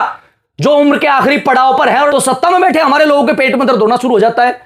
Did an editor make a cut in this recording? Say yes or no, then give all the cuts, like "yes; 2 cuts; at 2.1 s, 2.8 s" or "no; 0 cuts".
yes; 1 cut; at 2.1 s